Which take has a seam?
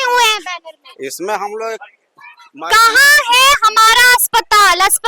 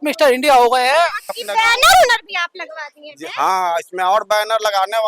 second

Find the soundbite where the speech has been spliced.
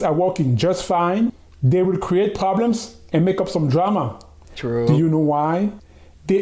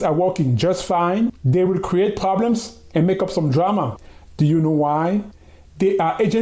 second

